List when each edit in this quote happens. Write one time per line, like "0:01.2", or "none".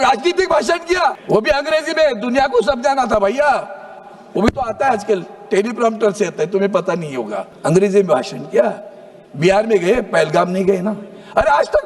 0:01.2
0:07.5